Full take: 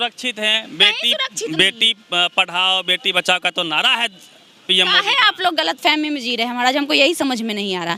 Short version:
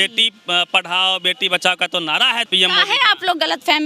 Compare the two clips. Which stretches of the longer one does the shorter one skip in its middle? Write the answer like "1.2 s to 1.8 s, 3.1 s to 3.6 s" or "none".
4.1 s to 4.6 s